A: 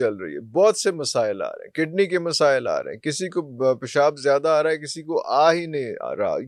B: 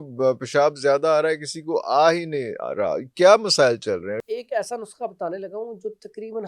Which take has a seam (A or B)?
B